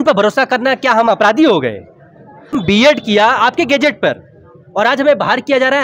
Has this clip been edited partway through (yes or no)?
yes